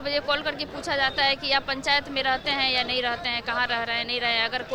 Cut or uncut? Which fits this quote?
uncut